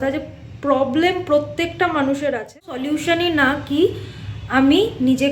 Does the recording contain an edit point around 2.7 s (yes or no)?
yes